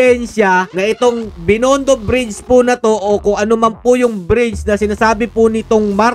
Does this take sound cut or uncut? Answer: uncut